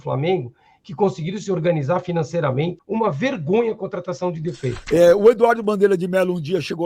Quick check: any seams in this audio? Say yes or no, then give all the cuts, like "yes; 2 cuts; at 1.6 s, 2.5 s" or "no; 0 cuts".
yes; 2 cuts; at 2.8 s, 4.8 s